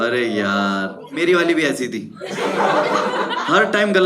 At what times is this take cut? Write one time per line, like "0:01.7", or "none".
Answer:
0:01.1